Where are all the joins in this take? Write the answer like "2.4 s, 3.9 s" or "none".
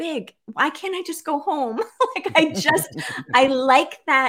none